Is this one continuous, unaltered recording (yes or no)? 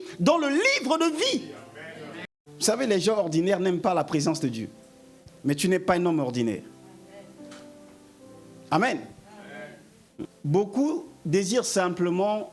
no